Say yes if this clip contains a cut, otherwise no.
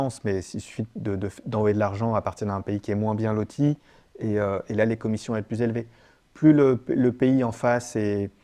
no